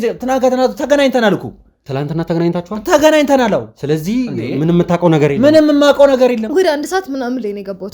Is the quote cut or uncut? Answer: cut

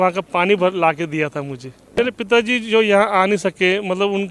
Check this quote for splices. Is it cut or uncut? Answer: cut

